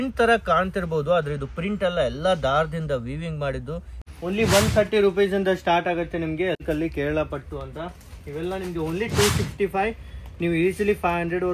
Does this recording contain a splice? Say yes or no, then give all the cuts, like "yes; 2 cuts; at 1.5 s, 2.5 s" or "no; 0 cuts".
yes; 2 cuts; at 4.0 s, 6.6 s